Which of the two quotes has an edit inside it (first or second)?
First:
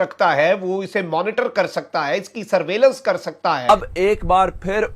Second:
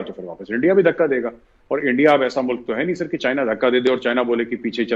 first